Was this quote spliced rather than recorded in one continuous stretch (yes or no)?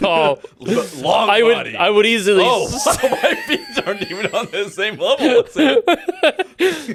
no